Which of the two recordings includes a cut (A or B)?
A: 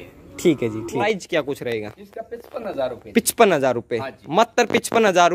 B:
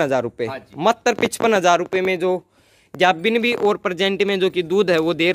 A